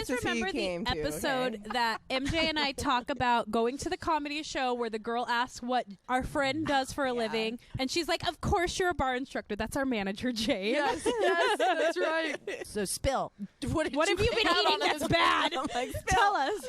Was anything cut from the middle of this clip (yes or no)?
yes